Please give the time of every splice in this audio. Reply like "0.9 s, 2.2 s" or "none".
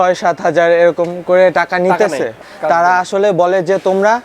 2.4 s